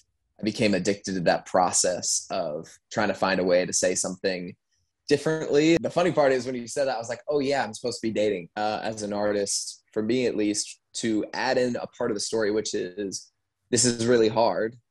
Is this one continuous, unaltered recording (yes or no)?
no